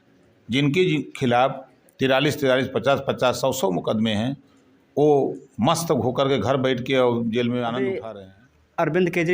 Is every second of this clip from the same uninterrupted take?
no; 1 cut; at 8.0 s

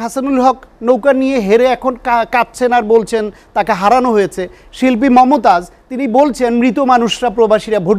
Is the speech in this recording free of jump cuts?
yes; 0 cuts

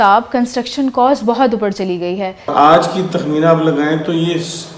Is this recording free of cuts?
no; 1 cut; at 2.5 s

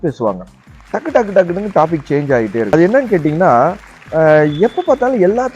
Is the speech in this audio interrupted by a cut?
yes; 1 cut; at 2.7 s

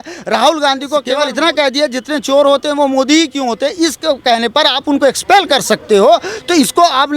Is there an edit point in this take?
yes; 1 cut; at 1.2 s

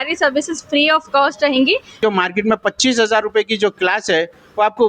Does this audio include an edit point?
yes; 1 cut; at 2.0 s

